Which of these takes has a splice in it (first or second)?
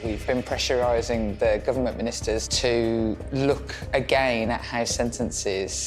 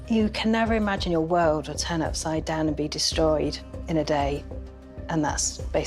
first